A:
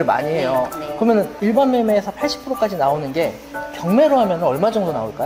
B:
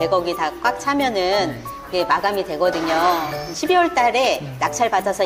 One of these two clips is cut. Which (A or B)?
A